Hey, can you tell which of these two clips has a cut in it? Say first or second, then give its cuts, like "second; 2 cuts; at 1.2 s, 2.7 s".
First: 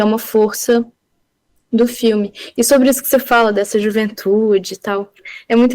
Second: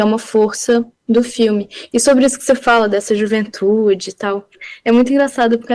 second; 1 cut; at 0.9 s